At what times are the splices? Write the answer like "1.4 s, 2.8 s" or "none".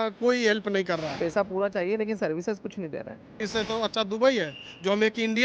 1.2 s, 3.4 s